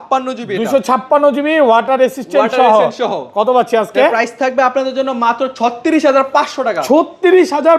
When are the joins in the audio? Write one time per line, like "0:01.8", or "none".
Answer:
none